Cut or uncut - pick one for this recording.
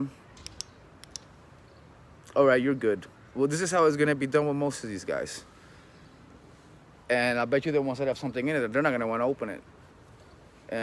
uncut